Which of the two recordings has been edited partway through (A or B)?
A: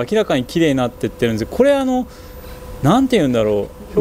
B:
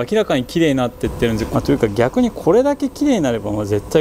B